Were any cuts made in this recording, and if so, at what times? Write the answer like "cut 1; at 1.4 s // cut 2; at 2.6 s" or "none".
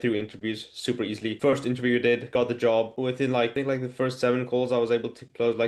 none